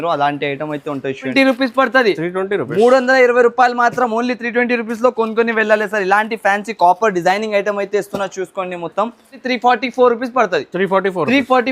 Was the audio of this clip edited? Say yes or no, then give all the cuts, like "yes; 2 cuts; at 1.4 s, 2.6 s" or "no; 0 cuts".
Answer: yes; 2 cuts; at 1.3 s, 9.4 s